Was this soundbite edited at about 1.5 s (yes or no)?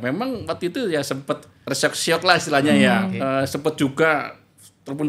yes